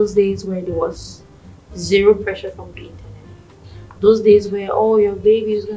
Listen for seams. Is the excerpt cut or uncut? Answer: uncut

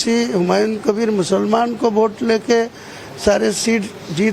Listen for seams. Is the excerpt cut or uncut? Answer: cut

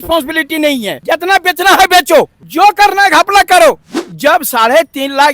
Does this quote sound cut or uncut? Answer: cut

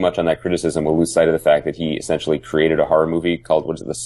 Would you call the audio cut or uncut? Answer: uncut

